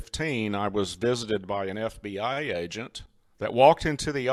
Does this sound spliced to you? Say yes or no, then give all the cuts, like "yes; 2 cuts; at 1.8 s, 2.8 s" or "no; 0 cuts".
no; 0 cuts